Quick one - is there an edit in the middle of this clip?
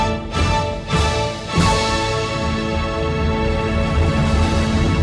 no; 0 cuts

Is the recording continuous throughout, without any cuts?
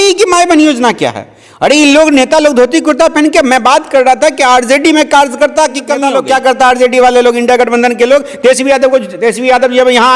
no; 1 cut; at 6.0 s

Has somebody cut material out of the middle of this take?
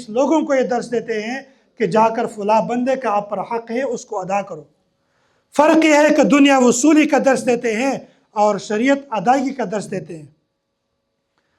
no; 0 cuts

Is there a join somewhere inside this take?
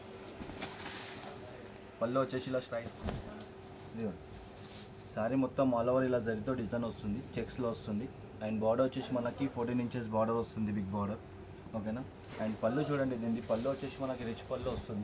yes; 1 cut; at 2.8 s

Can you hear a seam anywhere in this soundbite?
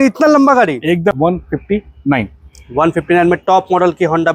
yes; 1 cut; at 1.1 s

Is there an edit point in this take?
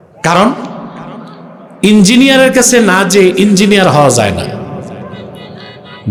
no; 0 cuts

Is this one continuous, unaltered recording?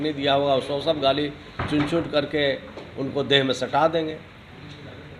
yes; 0 cuts

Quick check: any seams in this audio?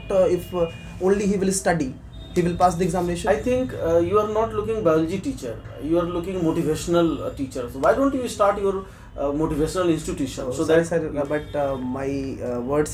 no; 0 cuts

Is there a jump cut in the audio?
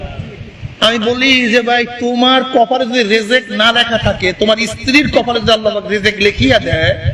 no; 0 cuts

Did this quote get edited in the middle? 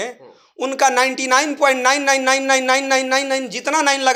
no; 0 cuts

